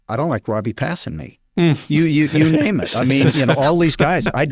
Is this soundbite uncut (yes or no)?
yes